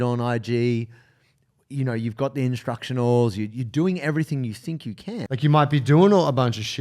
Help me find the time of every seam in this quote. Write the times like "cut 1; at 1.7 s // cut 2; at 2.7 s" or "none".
cut 1; at 5.2 s